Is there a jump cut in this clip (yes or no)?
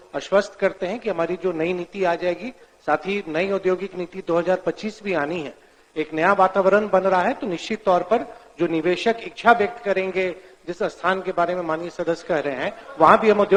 no